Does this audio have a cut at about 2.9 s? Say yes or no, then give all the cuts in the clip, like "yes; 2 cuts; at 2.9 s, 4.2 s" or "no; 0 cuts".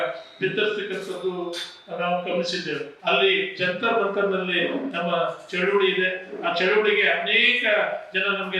yes; 1 cut; at 2.9 s